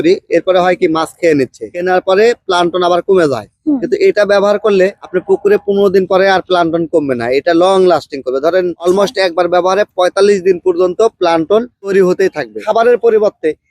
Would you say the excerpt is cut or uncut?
cut